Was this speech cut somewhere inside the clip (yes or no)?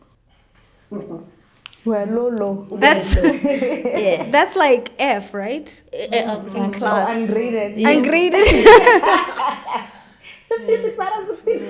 no